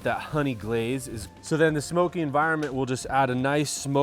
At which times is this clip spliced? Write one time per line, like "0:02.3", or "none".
0:01.3